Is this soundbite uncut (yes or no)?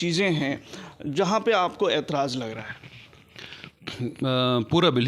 yes